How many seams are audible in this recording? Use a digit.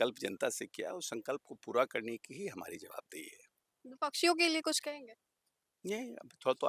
0